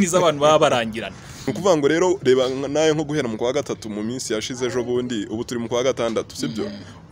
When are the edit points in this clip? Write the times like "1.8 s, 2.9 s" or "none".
1.4 s